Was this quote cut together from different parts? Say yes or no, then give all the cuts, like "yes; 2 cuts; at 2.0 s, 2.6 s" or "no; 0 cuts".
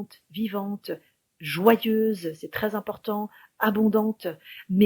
no; 0 cuts